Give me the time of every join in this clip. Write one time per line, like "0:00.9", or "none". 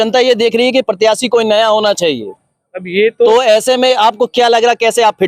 none